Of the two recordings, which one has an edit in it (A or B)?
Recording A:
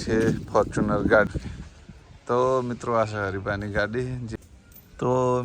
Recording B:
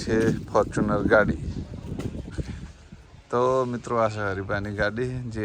A